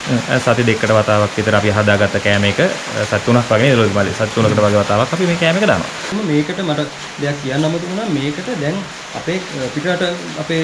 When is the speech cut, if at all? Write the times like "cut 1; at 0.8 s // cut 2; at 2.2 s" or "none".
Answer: cut 1; at 6.0 s